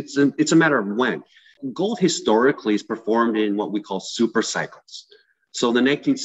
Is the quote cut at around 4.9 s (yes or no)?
no